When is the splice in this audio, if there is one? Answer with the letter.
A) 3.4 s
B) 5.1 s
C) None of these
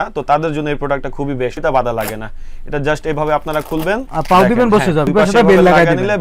B